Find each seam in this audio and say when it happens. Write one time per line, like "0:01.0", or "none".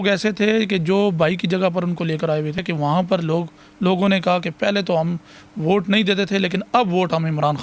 0:02.7